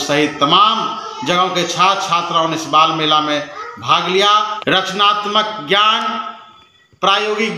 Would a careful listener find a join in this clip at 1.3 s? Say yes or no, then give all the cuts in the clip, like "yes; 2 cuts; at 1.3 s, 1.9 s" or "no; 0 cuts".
no; 1 cut; at 4.5 s